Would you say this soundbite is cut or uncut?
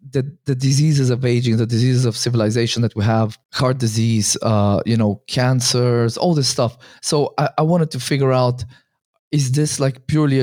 cut